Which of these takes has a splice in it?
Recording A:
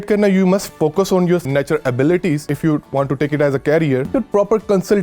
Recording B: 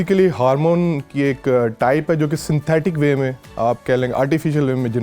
A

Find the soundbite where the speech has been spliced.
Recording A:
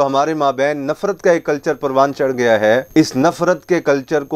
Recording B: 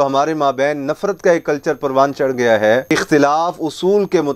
B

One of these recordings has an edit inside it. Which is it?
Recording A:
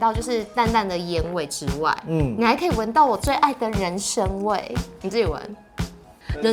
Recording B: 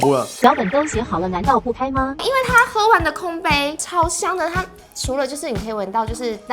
B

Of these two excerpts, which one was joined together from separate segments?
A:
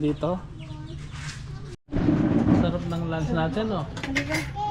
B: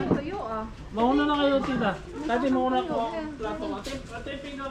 A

